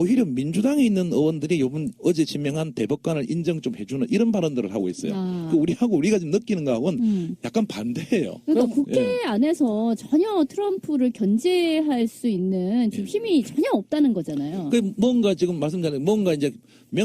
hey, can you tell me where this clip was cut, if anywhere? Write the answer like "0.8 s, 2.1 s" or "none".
none